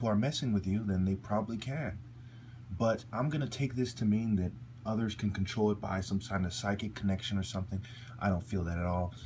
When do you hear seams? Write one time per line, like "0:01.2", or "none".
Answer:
0:07.0